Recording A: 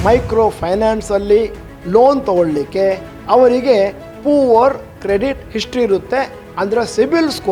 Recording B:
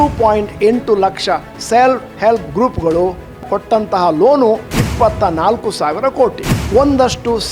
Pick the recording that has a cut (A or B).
B